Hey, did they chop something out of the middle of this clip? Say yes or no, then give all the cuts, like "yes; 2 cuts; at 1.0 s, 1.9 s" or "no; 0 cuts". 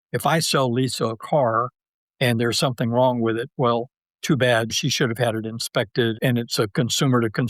yes; 2 cuts; at 4.7 s, 6.2 s